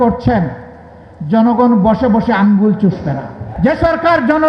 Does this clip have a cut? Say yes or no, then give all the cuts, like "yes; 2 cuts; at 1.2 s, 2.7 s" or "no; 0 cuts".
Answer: yes; 1 cut; at 3.5 s